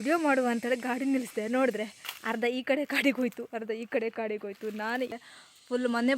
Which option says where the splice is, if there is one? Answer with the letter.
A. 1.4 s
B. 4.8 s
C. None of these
B